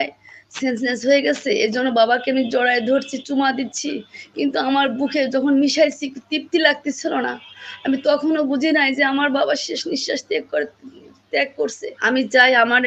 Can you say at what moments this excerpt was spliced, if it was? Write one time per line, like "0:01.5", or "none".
0:11.9